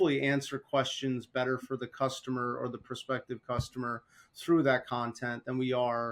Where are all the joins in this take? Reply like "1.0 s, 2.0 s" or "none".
none